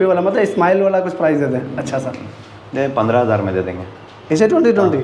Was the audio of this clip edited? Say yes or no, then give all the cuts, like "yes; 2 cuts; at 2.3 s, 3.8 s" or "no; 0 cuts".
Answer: no; 0 cuts